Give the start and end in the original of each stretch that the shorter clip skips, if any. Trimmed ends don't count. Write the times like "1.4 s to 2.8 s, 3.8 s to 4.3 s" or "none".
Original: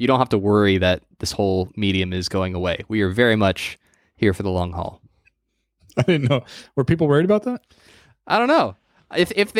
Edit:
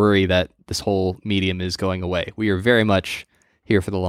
none